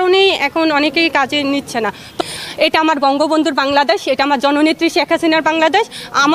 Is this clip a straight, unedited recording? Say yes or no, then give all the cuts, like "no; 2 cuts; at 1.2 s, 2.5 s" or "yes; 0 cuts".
no; 1 cut; at 2.2 s